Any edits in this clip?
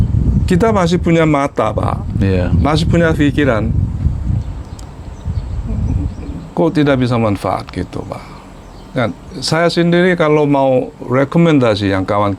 no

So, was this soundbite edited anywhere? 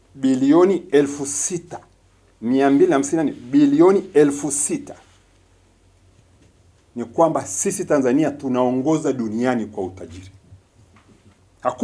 no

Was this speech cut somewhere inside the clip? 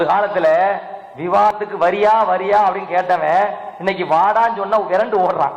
yes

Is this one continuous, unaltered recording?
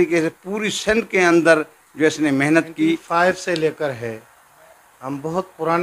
no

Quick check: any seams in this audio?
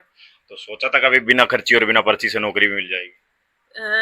no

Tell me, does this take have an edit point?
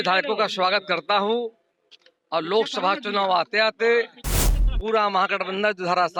no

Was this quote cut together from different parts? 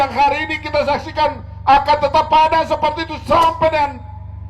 no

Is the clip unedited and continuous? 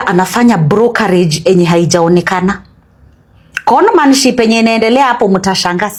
yes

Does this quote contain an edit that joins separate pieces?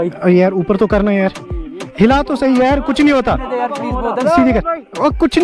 yes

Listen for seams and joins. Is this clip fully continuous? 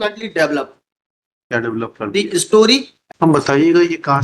no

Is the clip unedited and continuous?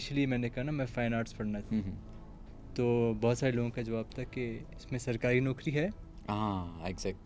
yes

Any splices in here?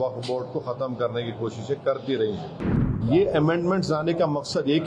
yes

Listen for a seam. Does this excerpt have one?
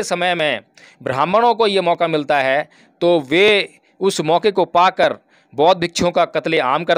no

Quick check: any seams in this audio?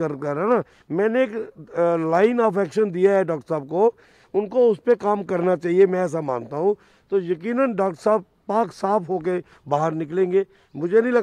no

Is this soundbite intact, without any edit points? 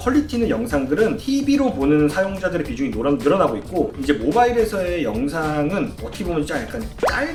yes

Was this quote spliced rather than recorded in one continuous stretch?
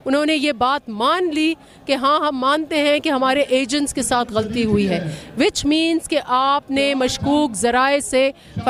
no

